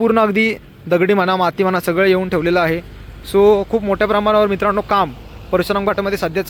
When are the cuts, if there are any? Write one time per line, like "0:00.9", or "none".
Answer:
none